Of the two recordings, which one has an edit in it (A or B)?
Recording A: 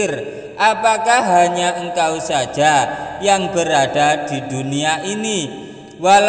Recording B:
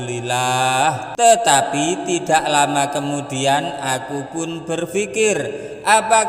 B